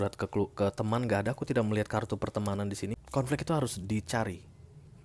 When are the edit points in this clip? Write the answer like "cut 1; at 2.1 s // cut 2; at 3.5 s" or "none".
cut 1; at 3.0 s